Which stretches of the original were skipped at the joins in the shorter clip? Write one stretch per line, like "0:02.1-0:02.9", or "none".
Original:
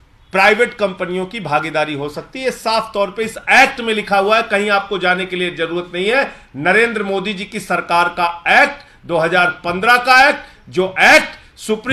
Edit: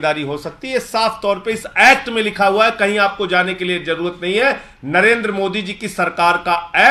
none